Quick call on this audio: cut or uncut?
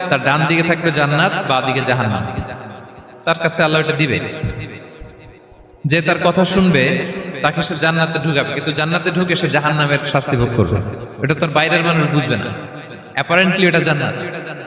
uncut